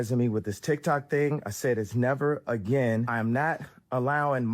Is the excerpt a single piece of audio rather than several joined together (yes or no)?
no